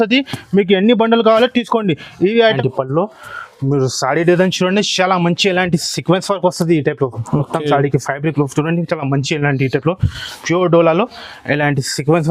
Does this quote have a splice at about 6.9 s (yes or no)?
no